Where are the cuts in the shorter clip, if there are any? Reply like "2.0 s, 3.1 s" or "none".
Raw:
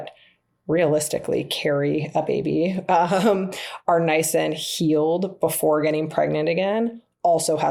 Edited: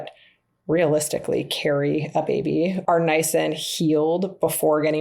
2.8 s